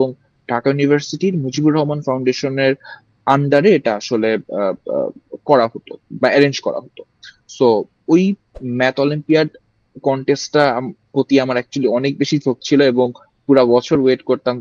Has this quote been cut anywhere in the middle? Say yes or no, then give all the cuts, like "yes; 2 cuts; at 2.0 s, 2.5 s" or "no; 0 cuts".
yes; 1 cut; at 8.5 s